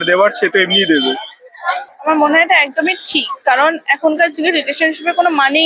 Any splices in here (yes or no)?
no